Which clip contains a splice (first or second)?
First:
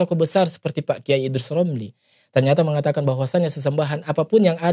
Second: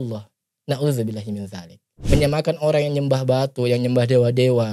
second